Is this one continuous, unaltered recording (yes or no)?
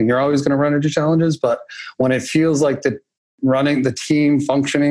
yes